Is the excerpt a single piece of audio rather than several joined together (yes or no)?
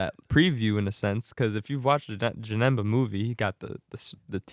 yes